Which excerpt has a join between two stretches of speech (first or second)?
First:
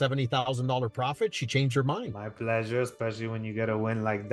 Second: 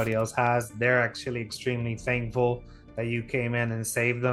first